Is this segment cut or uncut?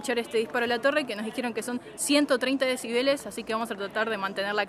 uncut